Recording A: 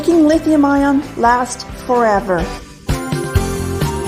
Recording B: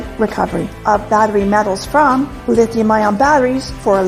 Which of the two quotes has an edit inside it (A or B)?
A